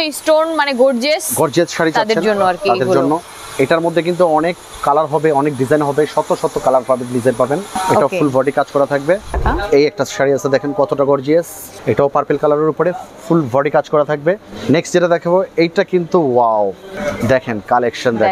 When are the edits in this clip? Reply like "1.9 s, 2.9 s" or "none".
7.7 s, 9.4 s, 11.6 s, 14.5 s, 16.9 s

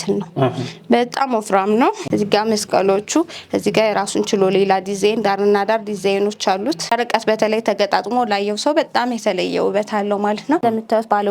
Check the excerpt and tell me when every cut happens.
2.0 s, 6.9 s, 10.6 s

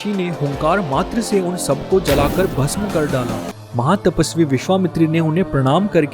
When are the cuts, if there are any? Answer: 3.5 s

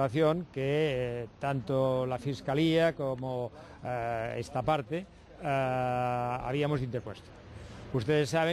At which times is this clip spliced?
1.4 s

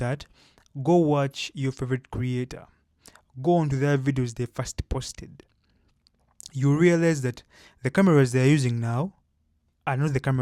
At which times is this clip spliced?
none

